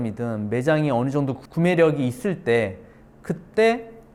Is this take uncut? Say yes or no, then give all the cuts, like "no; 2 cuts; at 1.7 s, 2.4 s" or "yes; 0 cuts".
yes; 0 cuts